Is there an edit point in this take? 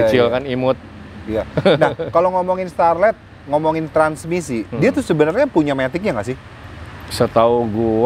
no; 0 cuts

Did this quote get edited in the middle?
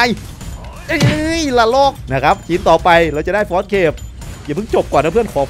yes; 1 cut; at 2.0 s

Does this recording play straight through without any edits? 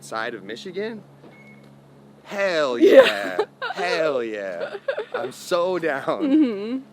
yes; 0 cuts

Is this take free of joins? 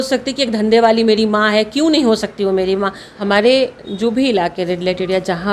no; 1 cut; at 3.0 s

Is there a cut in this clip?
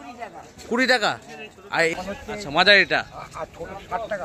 yes; 1 cut; at 2.0 s

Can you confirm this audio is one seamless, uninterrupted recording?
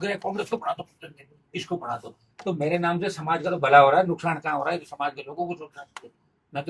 yes; 0 cuts

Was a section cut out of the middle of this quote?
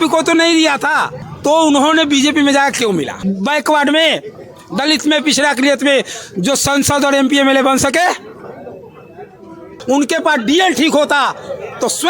yes; 2 cuts; at 3.2 s, 9.8 s

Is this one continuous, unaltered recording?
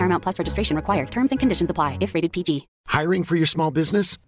no; 1 cut; at 2.8 s

